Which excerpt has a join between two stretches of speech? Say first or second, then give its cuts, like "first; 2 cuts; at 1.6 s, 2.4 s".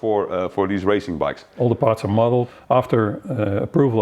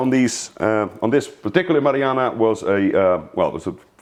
first; 2 cuts; at 1.4 s, 2.6 s